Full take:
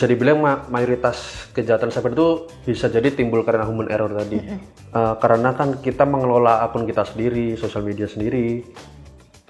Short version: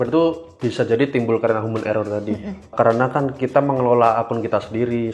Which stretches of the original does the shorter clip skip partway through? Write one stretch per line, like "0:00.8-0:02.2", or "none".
0:04.8-0:05.2